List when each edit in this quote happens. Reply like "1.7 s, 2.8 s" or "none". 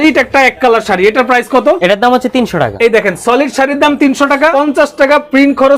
1.8 s, 2.7 s, 4.5 s